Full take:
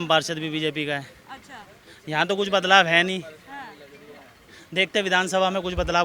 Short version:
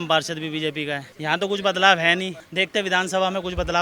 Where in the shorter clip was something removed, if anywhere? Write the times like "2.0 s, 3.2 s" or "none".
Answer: 1.1 s, 2.4 s